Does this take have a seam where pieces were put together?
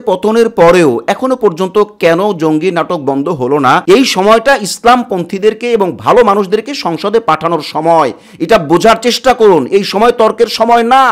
yes; 1 cut; at 3.8 s

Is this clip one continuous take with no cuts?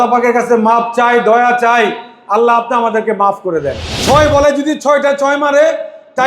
no; 1 cut; at 3.9 s

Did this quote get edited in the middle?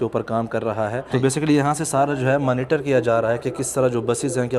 yes; 1 cut; at 1.0 s

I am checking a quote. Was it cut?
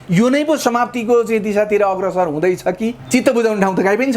yes; 1 cut; at 3.0 s

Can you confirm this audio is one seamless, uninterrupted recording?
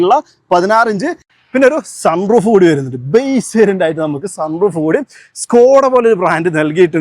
no; 1 cut; at 1.3 s

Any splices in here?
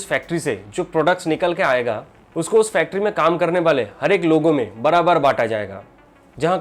no; 0 cuts

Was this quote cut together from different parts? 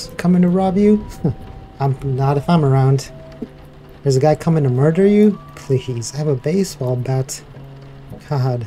no; 0 cuts

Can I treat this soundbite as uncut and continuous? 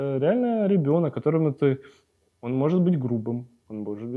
yes; 0 cuts

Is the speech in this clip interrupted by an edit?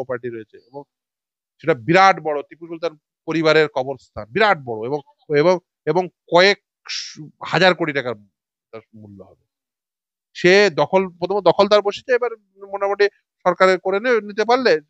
no; 0 cuts

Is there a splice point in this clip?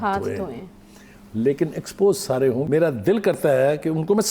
yes; 1 cut; at 2.6 s

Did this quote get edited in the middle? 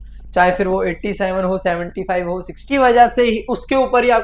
yes; 1 cut; at 2.5 s

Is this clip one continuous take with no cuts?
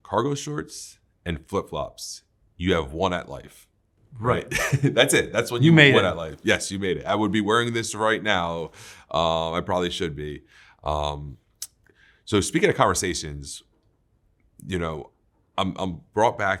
yes; 0 cuts

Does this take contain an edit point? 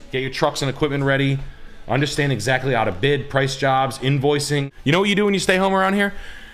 yes; 1 cut; at 4.7 s

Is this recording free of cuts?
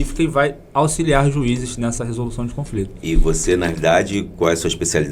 yes; 0 cuts

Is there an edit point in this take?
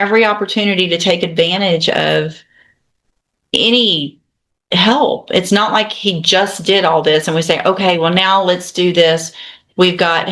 no; 0 cuts

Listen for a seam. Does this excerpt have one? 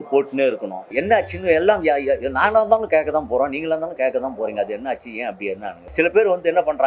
yes; 2 cuts; at 0.9 s, 5.9 s

